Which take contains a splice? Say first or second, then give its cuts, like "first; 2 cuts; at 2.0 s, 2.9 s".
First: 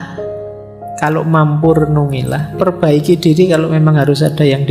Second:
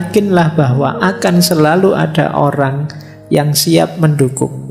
first; 1 cut; at 2.5 s